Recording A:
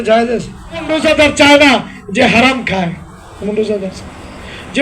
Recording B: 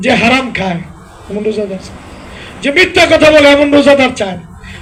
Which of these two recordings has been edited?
A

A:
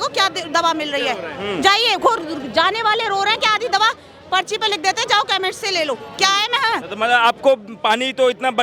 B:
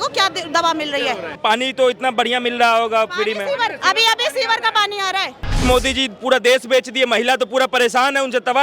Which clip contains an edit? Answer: B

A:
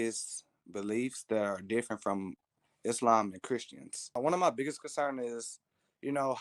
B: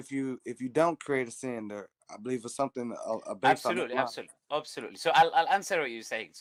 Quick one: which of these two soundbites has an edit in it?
A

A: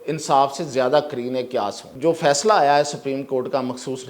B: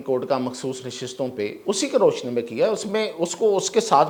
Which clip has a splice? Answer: A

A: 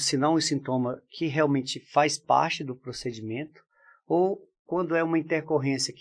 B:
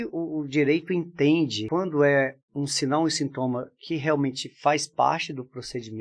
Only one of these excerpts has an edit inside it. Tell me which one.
B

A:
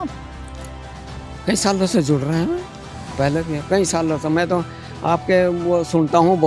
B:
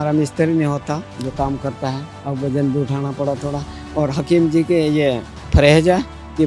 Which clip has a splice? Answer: B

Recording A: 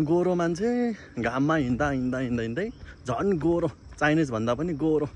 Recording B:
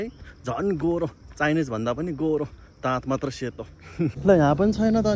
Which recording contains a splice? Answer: B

